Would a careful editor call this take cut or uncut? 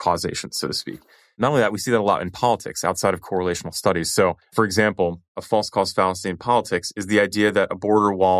uncut